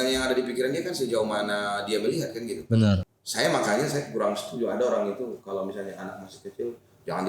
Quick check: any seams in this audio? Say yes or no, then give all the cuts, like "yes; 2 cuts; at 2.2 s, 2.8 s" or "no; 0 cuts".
yes; 1 cut; at 3.2 s